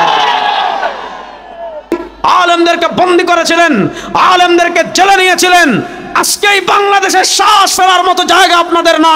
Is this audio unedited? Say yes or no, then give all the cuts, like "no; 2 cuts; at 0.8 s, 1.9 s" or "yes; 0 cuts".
no; 1 cut; at 1.9 s